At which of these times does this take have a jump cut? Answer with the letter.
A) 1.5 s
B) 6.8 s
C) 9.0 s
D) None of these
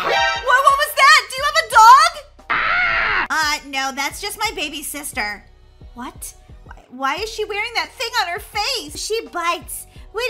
C